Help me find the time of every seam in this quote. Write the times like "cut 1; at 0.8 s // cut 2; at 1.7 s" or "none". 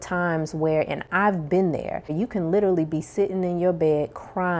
cut 1; at 2.1 s